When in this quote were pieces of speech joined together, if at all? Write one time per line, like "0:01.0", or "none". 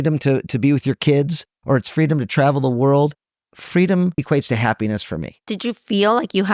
0:04.2
0:05.5